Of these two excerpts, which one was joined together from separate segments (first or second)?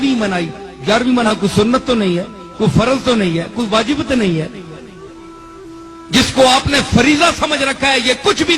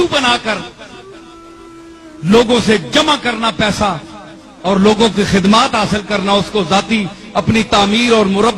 first